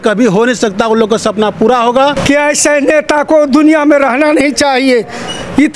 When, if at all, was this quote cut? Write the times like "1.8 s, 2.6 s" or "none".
2.2 s